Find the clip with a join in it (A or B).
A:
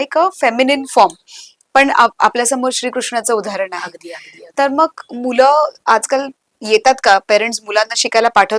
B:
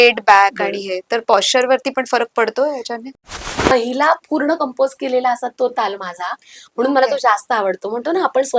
B